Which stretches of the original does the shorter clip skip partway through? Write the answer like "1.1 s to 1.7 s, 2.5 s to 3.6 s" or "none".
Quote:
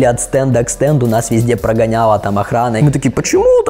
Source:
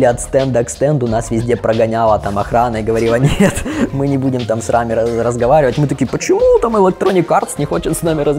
2.8 s to 5.8 s